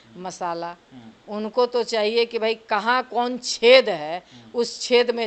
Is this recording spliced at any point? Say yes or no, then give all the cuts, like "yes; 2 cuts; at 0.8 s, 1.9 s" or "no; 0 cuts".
no; 0 cuts